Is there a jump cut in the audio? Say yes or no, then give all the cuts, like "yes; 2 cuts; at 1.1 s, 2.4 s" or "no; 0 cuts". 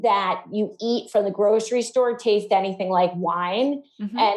no; 0 cuts